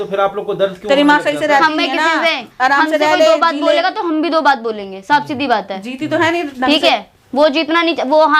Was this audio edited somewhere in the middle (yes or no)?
no